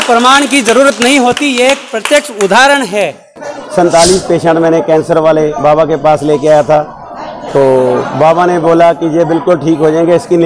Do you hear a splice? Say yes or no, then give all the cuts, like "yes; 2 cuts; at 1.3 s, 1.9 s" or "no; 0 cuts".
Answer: yes; 1 cut; at 3.4 s